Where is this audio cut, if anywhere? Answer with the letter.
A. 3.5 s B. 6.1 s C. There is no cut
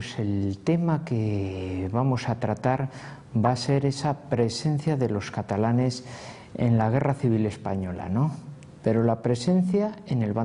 A